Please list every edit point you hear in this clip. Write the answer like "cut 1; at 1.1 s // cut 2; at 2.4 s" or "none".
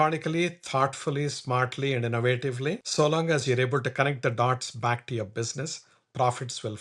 cut 1; at 2.8 s